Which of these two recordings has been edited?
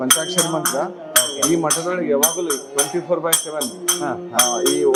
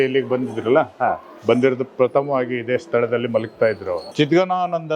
second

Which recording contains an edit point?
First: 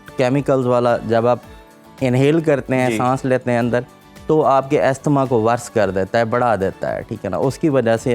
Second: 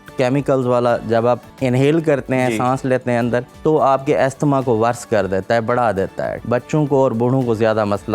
second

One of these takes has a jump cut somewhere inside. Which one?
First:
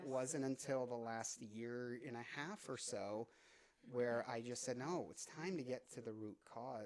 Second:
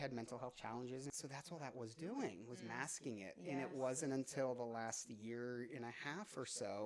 second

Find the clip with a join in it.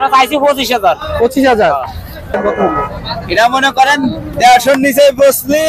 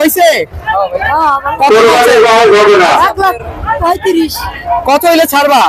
first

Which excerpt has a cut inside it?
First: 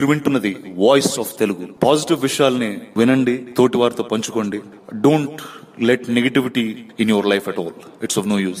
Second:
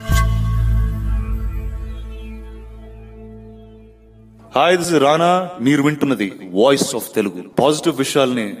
second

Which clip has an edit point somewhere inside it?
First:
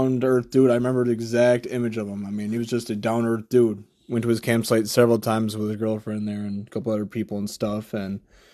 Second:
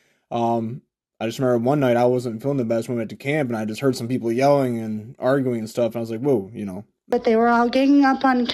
second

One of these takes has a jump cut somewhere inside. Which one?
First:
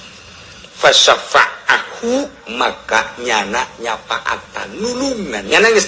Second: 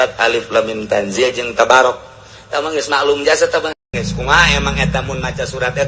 second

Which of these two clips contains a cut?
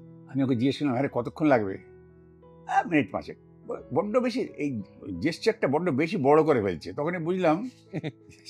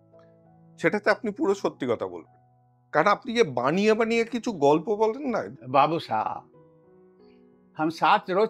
second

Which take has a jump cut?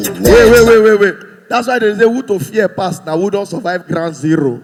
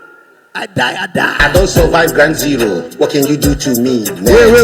second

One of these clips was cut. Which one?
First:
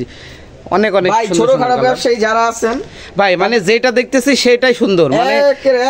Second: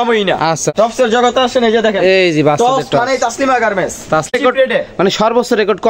second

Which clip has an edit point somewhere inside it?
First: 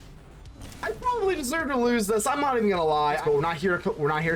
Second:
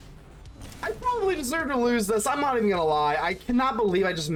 first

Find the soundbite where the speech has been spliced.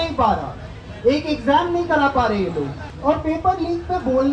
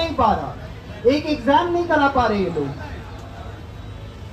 first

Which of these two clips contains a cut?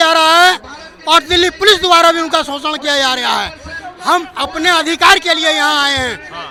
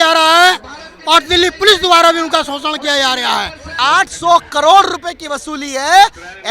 second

